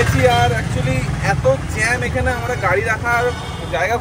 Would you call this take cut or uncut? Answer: uncut